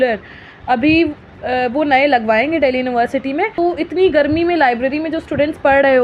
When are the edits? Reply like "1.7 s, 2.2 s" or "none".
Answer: 3.5 s